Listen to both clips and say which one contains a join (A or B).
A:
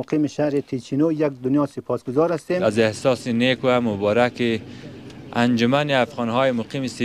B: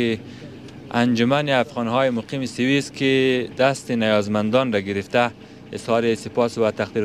A